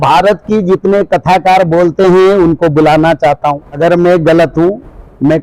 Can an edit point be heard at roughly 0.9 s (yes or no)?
no